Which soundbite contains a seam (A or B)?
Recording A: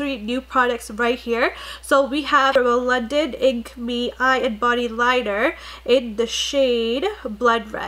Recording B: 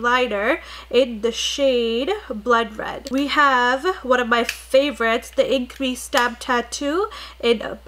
A